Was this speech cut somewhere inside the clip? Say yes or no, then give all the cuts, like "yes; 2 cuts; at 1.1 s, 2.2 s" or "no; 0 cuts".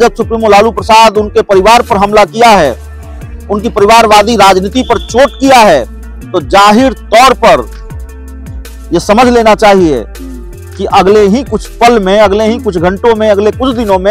no; 0 cuts